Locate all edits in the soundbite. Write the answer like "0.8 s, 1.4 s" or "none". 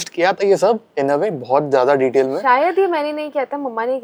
none